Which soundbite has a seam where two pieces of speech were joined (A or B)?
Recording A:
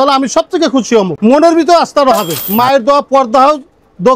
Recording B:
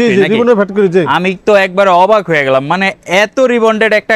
A